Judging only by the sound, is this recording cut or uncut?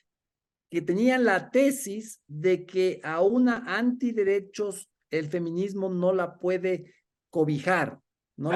uncut